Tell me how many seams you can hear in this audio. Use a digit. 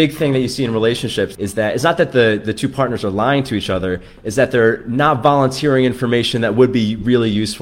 1